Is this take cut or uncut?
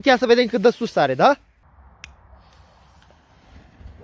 cut